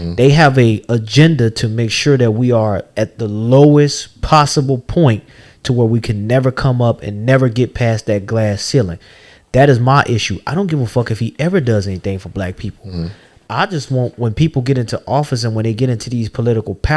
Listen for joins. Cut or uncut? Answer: uncut